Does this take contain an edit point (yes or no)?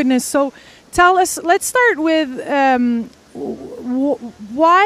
yes